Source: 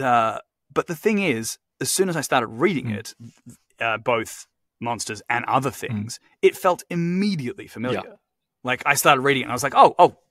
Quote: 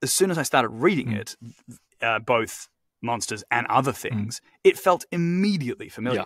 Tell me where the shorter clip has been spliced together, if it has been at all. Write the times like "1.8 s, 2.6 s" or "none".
none